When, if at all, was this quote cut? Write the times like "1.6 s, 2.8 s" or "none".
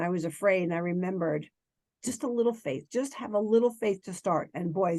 none